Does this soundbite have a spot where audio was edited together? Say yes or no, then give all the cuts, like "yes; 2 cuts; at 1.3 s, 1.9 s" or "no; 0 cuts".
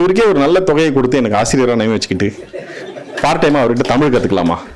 no; 0 cuts